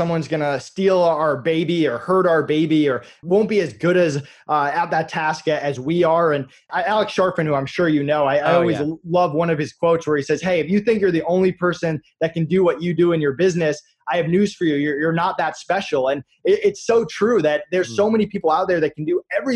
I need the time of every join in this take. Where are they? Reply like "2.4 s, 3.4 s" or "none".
3.2 s, 6.6 s